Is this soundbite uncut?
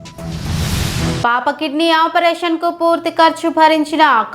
no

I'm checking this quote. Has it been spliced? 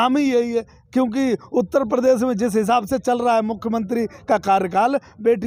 no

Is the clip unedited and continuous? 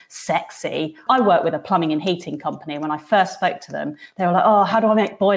no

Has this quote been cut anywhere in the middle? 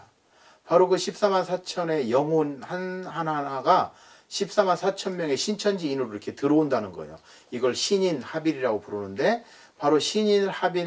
no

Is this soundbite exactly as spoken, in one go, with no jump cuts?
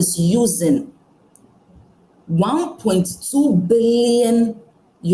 yes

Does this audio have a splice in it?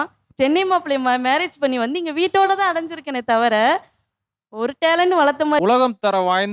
yes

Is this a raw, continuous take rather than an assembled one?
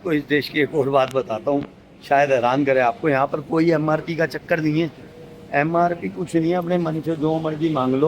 yes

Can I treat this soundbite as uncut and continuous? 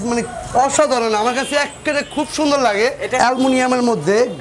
no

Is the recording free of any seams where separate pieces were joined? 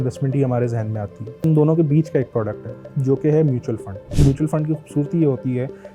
no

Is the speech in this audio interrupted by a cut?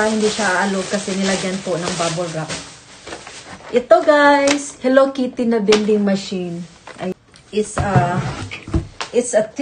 yes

